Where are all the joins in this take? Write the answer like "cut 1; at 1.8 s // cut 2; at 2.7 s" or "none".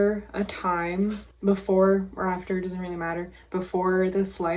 cut 1; at 1.3 s